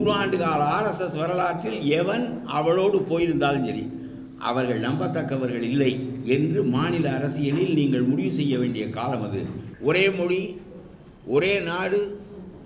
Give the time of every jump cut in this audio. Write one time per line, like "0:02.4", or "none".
0:09.6

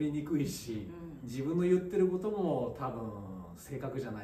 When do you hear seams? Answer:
none

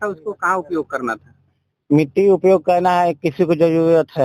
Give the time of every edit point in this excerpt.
none

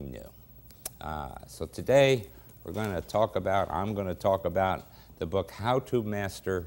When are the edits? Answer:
0:04.5

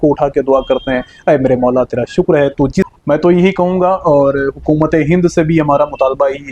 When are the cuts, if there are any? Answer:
0:02.9

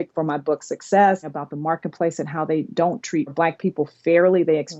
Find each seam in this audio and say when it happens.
0:01.3
0:03.3

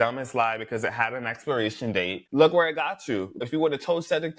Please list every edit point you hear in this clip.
0:02.2
0:03.4

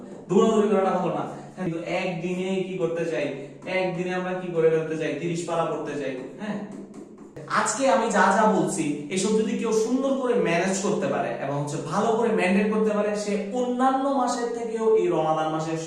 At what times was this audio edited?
0:01.7
0:07.4

